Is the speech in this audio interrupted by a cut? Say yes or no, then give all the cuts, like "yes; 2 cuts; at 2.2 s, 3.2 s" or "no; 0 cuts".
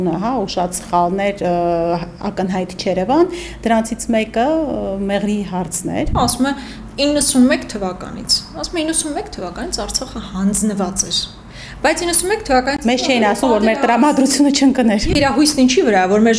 yes; 2 cuts; at 6.1 s, 15.0 s